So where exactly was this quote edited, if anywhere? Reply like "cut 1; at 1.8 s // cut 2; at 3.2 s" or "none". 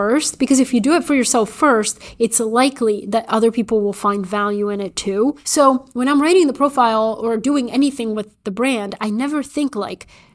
cut 1; at 5.7 s